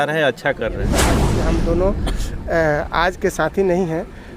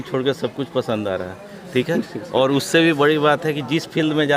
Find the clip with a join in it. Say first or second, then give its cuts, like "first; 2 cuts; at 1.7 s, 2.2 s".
first; 1 cut; at 1.2 s